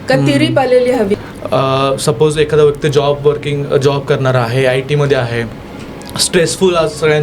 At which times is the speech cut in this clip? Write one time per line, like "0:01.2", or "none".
0:01.1